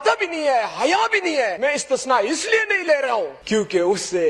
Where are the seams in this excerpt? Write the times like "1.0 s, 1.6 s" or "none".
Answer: 1.5 s, 3.4 s